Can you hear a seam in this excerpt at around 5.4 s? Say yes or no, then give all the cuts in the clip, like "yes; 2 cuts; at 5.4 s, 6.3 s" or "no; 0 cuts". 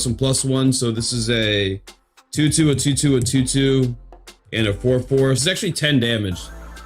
yes; 1 cut; at 5.4 s